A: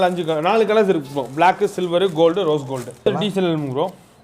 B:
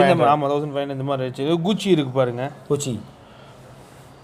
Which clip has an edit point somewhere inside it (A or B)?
A